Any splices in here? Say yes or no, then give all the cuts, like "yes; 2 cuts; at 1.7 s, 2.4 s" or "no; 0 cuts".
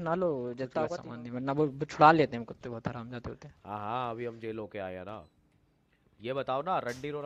yes; 1 cut; at 1.0 s